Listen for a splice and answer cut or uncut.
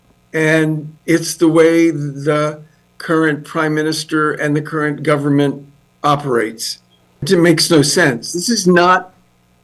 cut